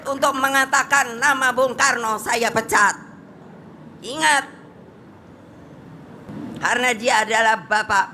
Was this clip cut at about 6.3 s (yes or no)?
yes